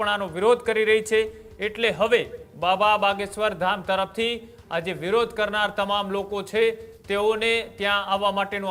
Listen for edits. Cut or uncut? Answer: uncut